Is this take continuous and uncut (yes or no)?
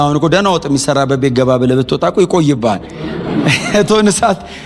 yes